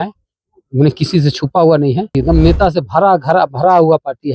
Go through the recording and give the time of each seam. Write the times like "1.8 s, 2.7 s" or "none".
2.1 s